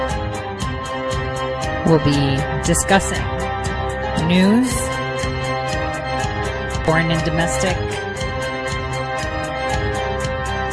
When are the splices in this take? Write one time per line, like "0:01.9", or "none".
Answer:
0:06.9